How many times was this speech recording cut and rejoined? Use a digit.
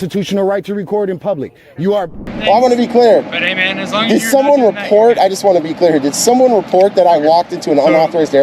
1